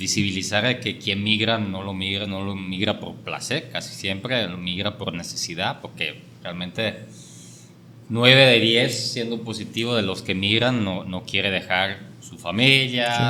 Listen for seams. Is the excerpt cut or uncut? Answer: uncut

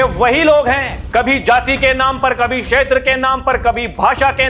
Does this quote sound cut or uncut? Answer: cut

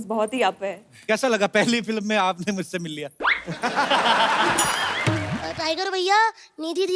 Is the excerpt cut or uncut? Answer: cut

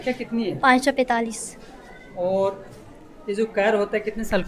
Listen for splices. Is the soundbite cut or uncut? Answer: uncut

